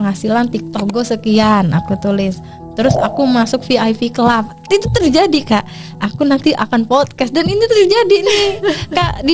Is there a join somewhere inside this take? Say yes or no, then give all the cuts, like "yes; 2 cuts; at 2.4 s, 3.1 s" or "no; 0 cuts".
no; 0 cuts